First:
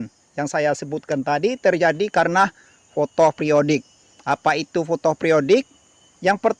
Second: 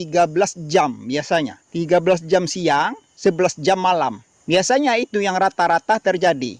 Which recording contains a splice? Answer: second; 3 cuts; at 1.6 s, 3.0 s, 4.3 s

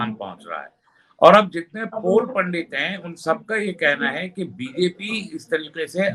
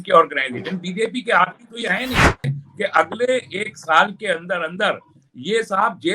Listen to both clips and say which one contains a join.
second; 1 cut; at 2.5 s

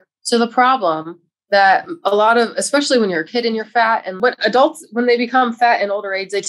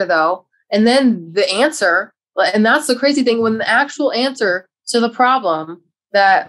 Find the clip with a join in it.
first; 1 cut; at 4.1 s

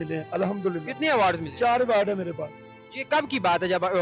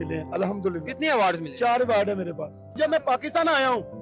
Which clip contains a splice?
second; 1 cut; at 2.7 s

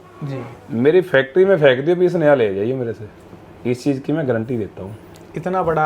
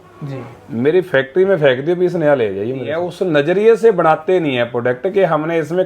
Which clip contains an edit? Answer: second; 1 cut; at 3.0 s

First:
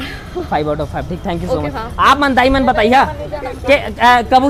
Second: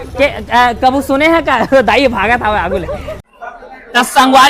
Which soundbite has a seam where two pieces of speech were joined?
second; 1 cut; at 3.1 s

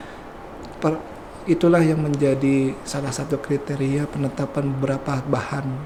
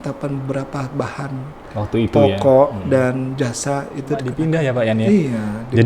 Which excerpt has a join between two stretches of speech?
second; 1 cut; at 4.3 s

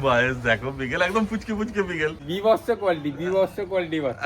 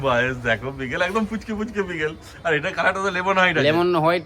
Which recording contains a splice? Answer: first; 1 cut; at 2.2 s

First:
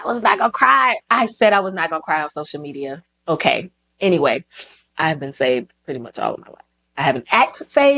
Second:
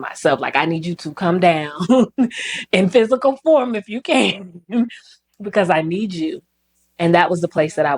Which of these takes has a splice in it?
first; 1 cut; at 4.9 s

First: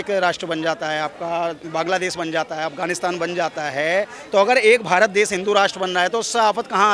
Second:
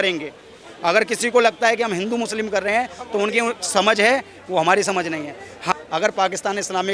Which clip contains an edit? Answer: second; 1 cut; at 5.7 s

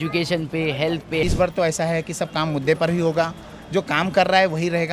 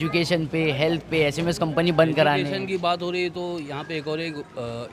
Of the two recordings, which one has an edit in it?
first; 1 cut; at 1.2 s

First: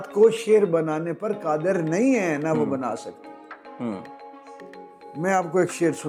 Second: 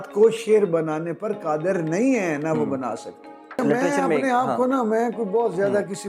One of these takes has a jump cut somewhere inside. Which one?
second; 1 cut; at 3.6 s

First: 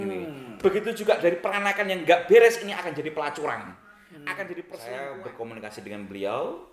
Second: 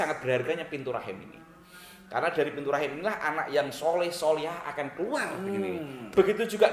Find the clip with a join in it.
first; 1 cut; at 4.8 s

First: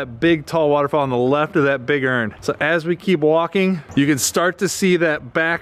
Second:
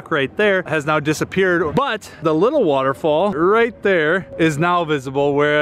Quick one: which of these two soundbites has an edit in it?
second; 2 cuts; at 1.7 s, 3.3 s

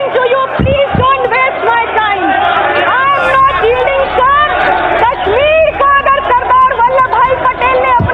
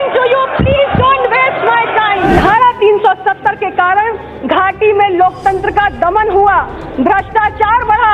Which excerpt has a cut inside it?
second; 1 cut; at 2.4 s

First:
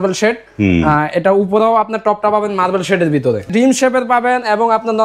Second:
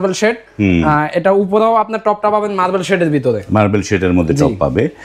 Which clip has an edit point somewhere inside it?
first; 1 cut; at 3.5 s

